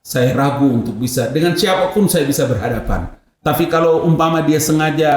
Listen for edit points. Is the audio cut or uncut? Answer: cut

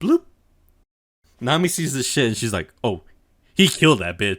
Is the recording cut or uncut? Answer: cut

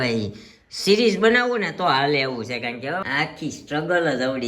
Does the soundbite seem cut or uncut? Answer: cut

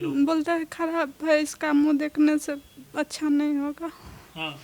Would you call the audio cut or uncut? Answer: uncut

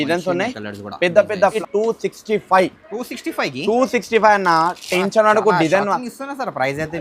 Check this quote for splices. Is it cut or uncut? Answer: cut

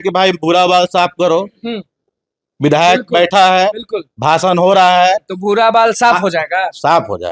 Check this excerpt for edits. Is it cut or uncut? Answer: uncut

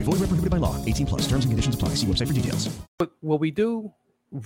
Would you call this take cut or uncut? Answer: cut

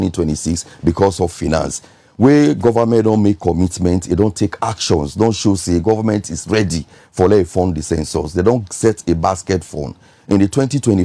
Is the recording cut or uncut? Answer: uncut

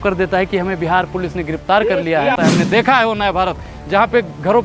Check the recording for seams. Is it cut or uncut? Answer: cut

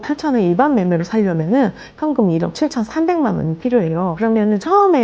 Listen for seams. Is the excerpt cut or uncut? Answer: cut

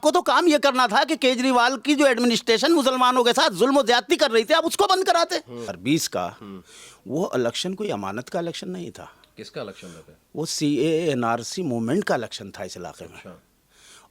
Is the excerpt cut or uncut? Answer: cut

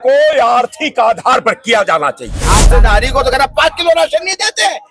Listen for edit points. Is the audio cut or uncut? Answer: cut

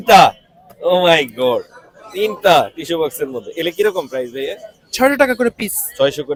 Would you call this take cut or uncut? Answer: uncut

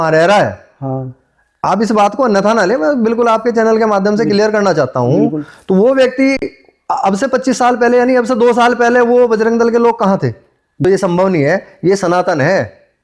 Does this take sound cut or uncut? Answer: cut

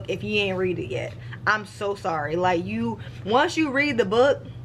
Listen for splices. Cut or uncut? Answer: uncut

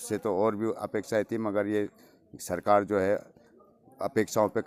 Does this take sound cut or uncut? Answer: uncut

